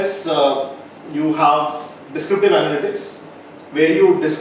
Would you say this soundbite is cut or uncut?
uncut